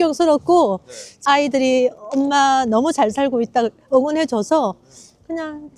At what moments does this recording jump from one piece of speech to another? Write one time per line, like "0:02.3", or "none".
0:01.1

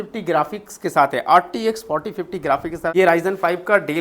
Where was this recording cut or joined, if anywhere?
0:02.9

